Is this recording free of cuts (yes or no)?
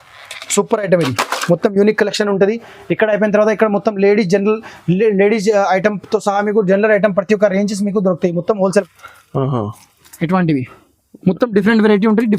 no